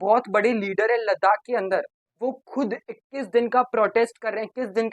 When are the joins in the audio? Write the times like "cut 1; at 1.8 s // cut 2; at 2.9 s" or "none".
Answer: cut 1; at 2.0 s